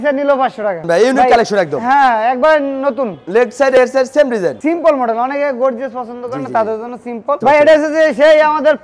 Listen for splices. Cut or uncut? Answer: cut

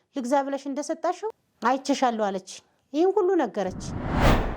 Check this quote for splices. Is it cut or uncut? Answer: cut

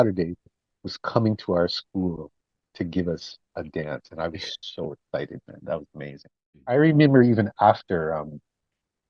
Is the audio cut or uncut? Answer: cut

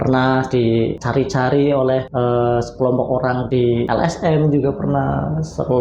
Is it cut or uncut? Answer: cut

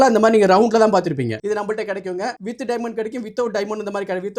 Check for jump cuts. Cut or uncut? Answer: cut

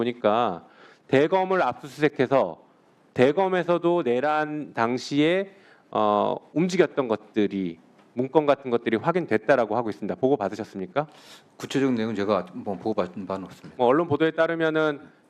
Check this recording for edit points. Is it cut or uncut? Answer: uncut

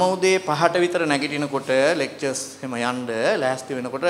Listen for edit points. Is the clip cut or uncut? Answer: uncut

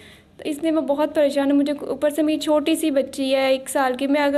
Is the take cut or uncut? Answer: uncut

